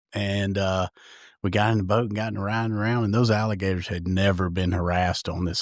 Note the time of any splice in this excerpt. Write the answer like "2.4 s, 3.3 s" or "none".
none